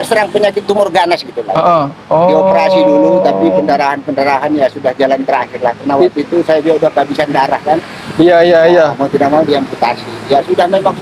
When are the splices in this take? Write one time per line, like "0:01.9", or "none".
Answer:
none